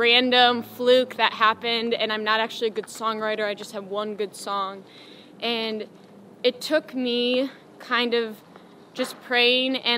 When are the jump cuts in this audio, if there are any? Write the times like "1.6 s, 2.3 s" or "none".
none